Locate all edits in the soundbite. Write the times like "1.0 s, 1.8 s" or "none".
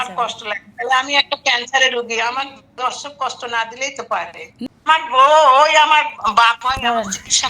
4.7 s